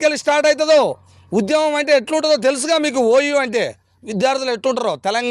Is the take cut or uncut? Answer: uncut